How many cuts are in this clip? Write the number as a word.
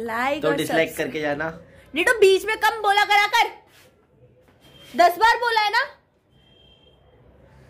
zero